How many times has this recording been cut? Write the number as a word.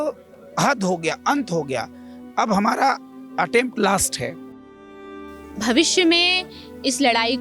one